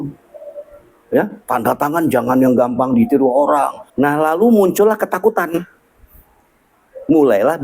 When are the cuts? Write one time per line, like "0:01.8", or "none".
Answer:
0:03.8